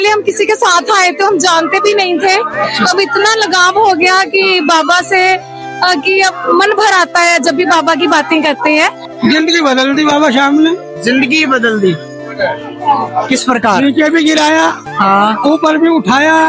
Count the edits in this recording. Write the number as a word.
one